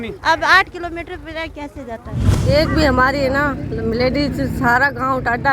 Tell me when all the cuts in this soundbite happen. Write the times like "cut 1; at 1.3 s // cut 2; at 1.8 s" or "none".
cut 1; at 2.4 s